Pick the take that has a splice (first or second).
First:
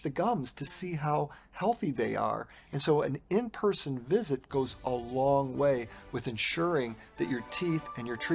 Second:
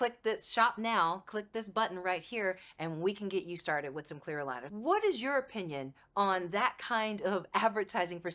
second